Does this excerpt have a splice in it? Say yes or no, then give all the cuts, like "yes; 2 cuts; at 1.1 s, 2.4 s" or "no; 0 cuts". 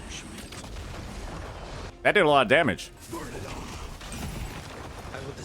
yes; 2 cuts; at 1.9 s, 2.9 s